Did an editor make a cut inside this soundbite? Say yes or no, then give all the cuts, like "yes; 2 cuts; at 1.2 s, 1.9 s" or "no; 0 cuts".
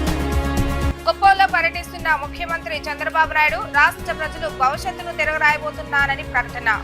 yes; 1 cut; at 0.9 s